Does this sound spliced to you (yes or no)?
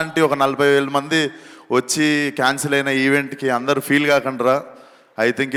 no